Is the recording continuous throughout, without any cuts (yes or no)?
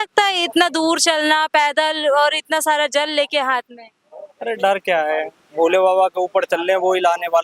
yes